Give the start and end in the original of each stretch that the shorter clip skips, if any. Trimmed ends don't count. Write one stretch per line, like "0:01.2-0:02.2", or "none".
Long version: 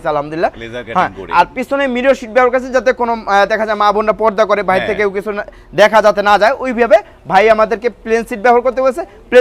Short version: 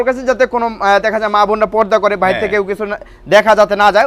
none